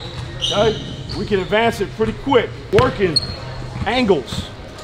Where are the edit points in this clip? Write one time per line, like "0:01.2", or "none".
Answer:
0:02.7